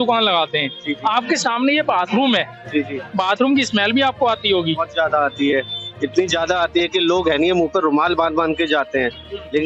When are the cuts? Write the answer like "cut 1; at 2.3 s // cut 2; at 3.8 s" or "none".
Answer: none